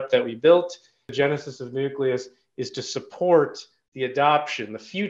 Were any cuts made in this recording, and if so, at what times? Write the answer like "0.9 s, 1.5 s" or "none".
1.0 s